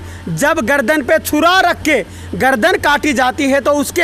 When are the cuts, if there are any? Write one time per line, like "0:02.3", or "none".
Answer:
none